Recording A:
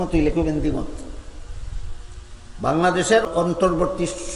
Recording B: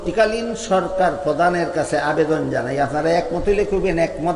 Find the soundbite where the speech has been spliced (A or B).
A